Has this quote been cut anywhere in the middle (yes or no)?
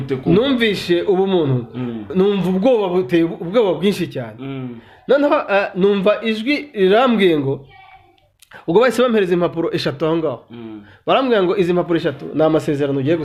no